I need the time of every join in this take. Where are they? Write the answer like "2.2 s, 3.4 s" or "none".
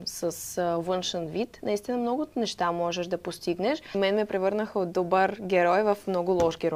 4.0 s

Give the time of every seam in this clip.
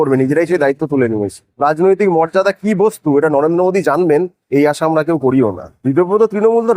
1.5 s, 5.7 s

